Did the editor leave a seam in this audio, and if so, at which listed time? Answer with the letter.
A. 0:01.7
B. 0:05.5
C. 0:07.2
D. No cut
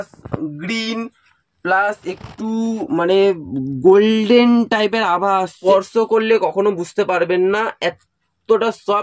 B